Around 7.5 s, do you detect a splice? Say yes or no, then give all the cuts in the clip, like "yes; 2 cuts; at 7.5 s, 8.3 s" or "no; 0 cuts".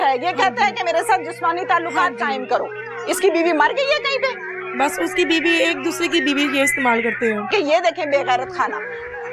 yes; 1 cut; at 7.5 s